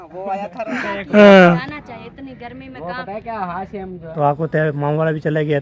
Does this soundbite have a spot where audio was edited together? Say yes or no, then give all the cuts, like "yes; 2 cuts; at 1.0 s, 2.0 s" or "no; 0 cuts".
yes; 2 cuts; at 0.9 s, 4.0 s